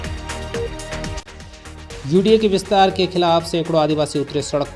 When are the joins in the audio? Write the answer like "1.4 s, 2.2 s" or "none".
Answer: 1.2 s

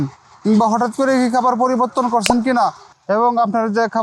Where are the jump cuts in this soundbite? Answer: 2.9 s

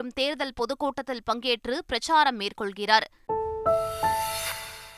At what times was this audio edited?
3.1 s

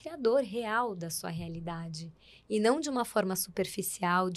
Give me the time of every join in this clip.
none

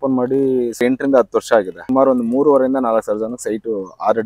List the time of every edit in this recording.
0.8 s, 1.8 s

